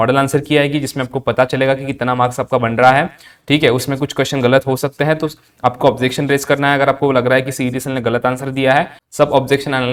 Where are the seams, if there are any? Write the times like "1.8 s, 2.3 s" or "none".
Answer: none